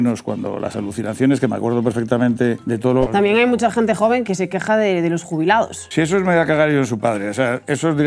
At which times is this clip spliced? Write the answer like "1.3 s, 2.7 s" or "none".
2.7 s, 4.2 s, 5.8 s